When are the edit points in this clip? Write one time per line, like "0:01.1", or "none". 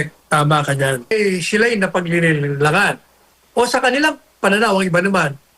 0:01.1